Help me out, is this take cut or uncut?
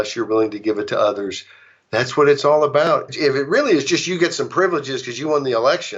cut